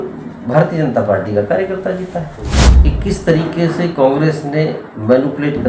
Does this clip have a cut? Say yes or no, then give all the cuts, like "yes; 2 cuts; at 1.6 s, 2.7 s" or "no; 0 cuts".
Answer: yes; 1 cut; at 2.6 s